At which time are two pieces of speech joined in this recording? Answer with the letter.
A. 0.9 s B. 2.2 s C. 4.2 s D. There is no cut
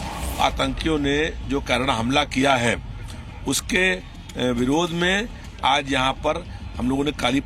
D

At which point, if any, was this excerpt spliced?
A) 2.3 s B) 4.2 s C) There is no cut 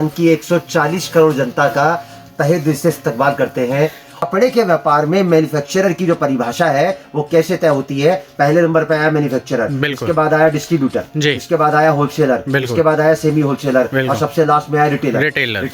B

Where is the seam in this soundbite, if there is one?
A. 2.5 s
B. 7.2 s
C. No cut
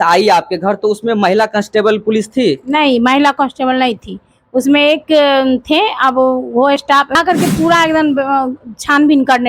B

